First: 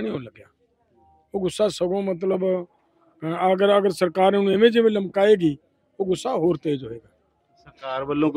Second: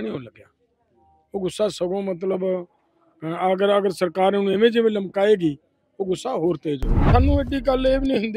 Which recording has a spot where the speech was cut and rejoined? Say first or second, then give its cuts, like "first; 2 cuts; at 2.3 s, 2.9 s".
second; 1 cut; at 6.9 s